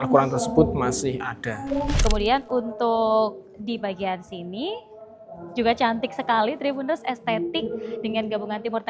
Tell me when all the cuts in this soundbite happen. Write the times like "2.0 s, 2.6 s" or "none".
1.9 s